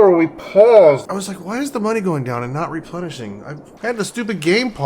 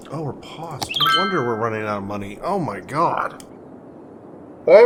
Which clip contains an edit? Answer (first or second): first